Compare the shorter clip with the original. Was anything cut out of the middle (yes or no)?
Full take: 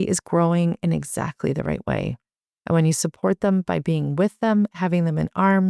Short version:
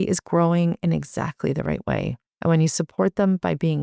yes